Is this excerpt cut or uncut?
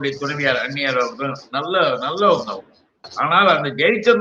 cut